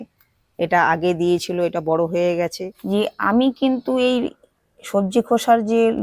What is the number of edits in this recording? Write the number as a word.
one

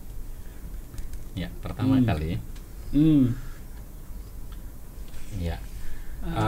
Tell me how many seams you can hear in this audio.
one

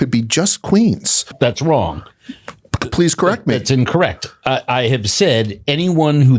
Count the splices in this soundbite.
one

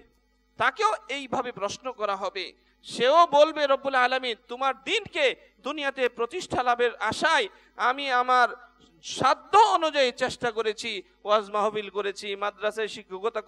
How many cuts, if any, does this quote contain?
zero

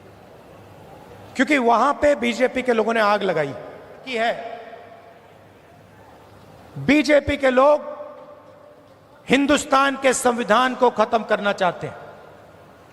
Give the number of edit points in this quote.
one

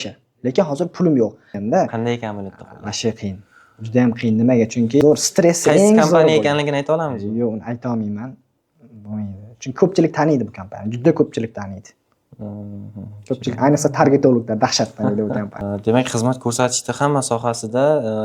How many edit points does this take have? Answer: three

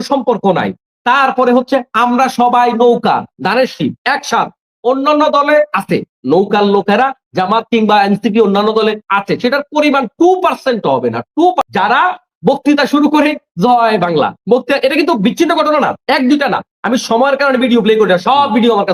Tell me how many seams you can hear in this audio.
one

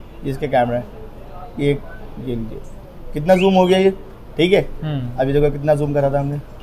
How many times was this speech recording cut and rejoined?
zero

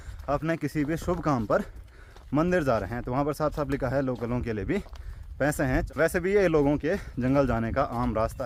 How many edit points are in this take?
zero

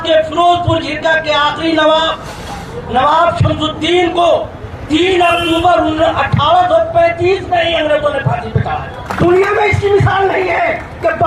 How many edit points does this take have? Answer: one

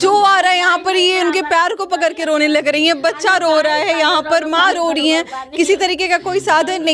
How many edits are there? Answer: zero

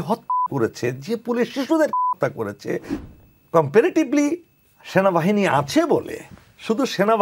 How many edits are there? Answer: one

